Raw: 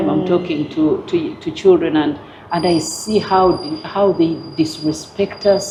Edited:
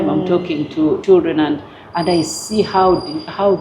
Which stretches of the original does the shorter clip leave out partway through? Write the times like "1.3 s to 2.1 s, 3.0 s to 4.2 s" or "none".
1.0 s to 1.6 s